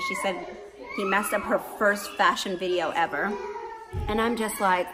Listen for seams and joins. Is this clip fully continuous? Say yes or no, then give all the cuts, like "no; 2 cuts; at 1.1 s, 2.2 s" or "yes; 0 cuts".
yes; 0 cuts